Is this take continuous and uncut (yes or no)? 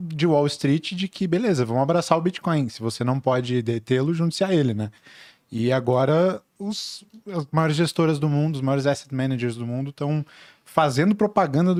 yes